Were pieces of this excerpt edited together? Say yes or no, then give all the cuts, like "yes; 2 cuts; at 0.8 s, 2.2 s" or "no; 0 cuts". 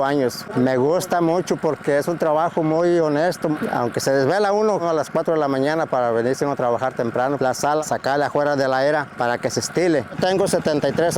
yes; 2 cuts; at 7.6 s, 10.2 s